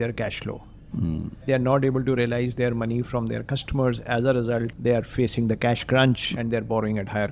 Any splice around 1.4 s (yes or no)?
yes